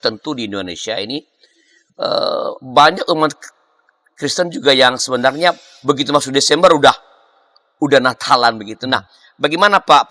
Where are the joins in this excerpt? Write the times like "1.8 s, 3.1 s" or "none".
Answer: none